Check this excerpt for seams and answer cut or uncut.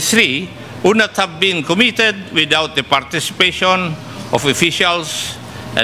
uncut